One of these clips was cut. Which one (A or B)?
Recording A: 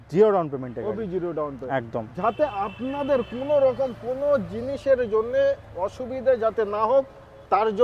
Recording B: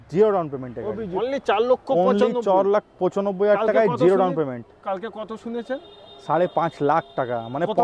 B